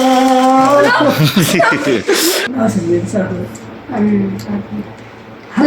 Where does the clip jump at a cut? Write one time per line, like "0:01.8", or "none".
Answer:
0:02.4

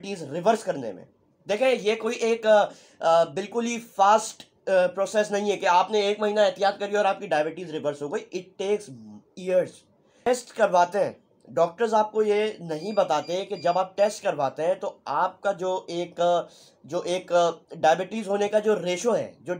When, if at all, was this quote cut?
0:10.3

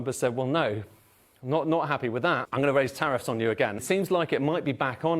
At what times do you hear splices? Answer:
0:02.5
0:03.8

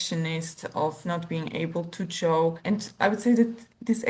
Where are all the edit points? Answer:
0:01.0

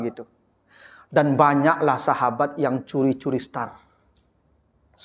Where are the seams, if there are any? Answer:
none

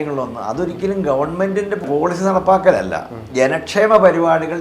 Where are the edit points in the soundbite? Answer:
0:01.8
0:03.2

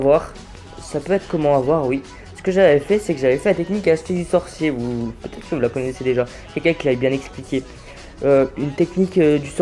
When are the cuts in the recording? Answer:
none

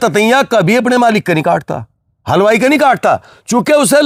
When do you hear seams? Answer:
none

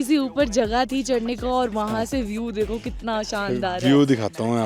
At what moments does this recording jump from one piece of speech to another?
none

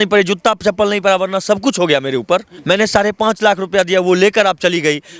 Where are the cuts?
0:02.5

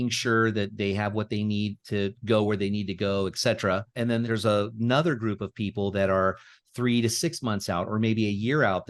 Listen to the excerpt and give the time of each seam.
0:04.2

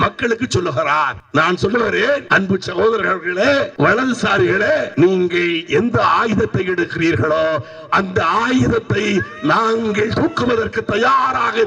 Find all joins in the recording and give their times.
0:01.2
0:02.2
0:03.7
0:04.9

